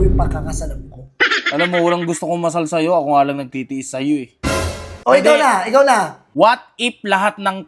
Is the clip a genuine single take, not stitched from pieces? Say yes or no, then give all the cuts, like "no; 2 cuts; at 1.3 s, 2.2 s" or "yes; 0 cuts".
no; 2 cuts; at 4.9 s, 6.2 s